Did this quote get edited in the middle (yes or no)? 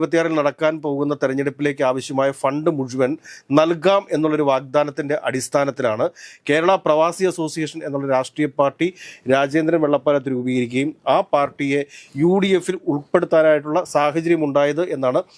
no